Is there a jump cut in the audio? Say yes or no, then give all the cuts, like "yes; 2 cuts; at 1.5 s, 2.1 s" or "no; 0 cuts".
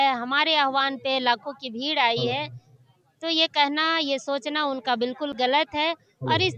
no; 0 cuts